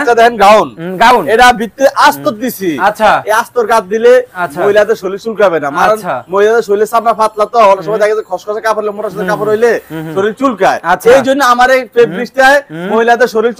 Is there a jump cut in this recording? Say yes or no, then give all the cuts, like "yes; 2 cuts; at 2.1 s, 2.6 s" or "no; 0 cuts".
no; 0 cuts